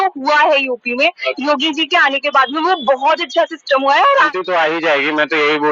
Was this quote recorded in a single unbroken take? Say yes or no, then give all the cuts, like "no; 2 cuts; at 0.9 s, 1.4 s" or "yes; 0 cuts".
no; 1 cut; at 4.3 s